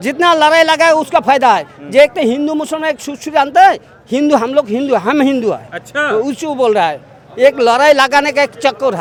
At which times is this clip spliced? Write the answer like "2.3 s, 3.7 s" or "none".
none

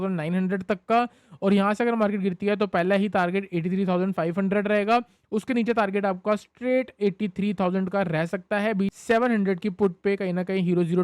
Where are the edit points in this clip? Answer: 8.9 s

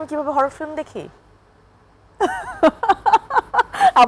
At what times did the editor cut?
none

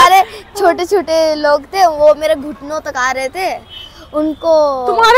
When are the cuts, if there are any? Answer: none

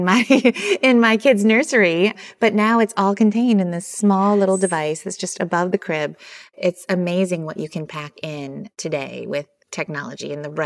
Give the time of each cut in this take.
6.5 s, 8.8 s

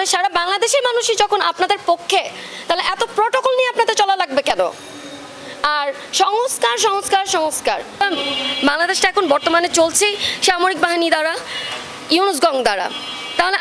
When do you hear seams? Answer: 8.0 s

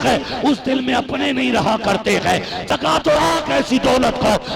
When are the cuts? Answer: 2.7 s

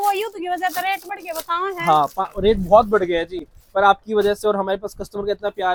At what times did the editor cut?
none

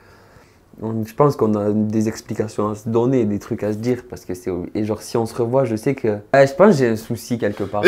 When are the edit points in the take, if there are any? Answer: 6.3 s

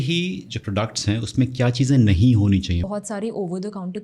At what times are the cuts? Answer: 2.9 s

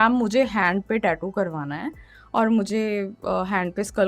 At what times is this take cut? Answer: none

